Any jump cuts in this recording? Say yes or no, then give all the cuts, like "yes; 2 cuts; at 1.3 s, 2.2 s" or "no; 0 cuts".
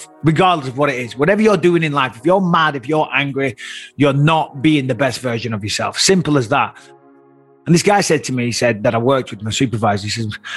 yes; 1 cut; at 7.1 s